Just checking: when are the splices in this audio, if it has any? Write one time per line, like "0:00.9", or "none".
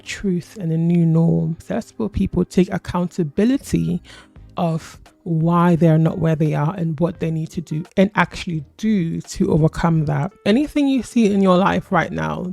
0:01.6
0:10.3